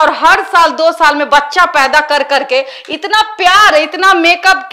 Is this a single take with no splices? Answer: yes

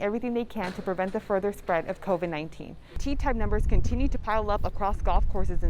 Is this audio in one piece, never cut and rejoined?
no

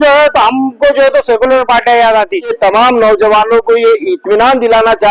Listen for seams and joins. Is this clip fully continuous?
no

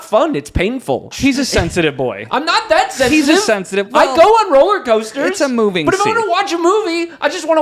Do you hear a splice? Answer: yes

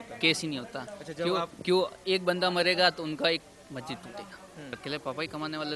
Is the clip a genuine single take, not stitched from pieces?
no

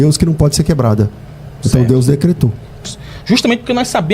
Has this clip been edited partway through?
yes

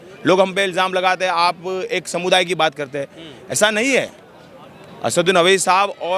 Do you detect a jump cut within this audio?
no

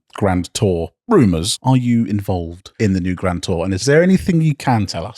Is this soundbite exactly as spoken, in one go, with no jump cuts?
no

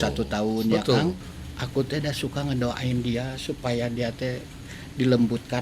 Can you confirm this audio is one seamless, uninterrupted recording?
no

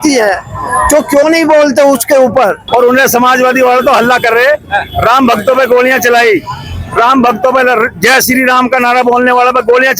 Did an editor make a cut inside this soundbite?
yes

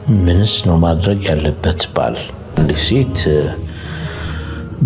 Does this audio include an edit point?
yes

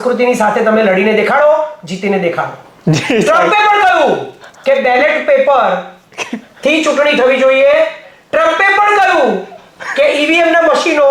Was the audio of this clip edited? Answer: no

